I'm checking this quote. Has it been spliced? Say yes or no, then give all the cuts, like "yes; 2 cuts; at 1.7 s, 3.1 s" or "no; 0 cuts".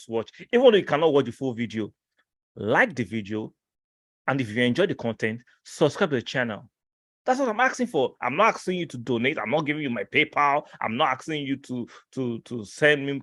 no; 0 cuts